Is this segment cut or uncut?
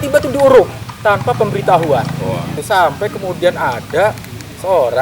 cut